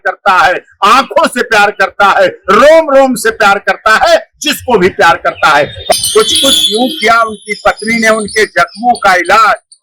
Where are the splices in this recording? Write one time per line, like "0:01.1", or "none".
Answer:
0:05.9